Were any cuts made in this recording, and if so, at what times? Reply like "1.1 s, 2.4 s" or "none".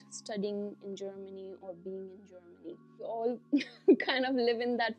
3.1 s